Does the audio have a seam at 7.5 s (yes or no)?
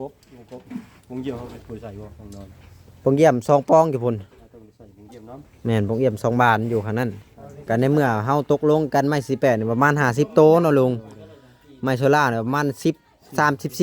yes